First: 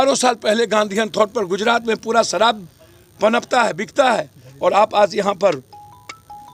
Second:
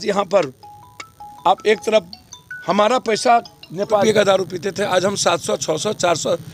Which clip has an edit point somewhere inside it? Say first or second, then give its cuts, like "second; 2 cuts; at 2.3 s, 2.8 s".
second; 1 cut; at 4.0 s